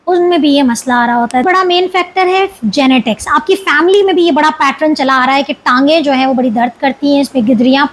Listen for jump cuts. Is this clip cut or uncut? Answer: cut